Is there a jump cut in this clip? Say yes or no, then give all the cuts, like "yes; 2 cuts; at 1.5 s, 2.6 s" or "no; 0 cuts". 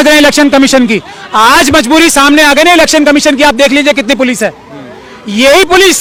no; 0 cuts